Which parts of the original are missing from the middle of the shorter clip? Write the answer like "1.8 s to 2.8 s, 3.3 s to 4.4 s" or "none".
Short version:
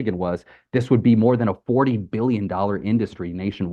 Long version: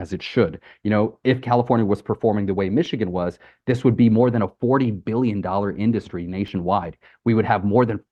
none